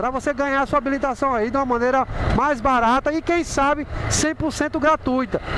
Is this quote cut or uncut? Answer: uncut